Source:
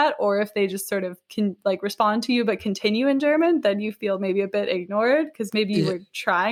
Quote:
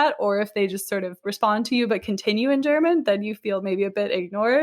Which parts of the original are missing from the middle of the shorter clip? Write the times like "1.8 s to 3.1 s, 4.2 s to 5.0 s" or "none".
1.3 s to 1.8 s